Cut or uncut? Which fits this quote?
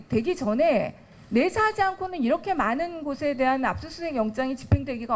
uncut